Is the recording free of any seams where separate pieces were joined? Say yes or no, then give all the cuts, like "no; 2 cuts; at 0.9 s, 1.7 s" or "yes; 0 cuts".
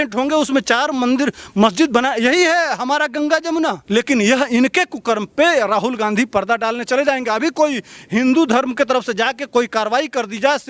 no; 1 cut; at 3.8 s